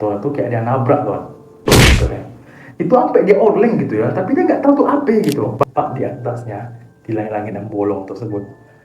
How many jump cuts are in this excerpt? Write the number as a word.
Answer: one